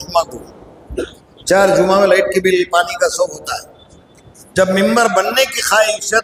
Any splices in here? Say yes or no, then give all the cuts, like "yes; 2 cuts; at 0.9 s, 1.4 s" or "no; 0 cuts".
no; 0 cuts